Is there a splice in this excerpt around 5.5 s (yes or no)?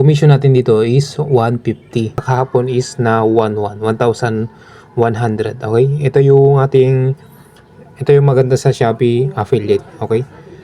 no